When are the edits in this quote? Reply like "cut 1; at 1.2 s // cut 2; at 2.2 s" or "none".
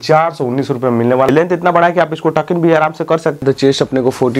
cut 1; at 1.3 s // cut 2; at 3.4 s